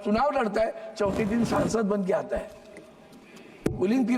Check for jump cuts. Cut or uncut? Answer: uncut